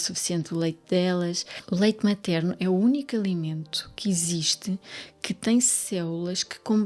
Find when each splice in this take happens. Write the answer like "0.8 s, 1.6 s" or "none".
1.5 s